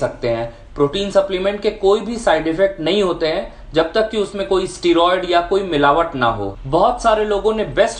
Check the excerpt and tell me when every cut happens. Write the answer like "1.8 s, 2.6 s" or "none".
6.5 s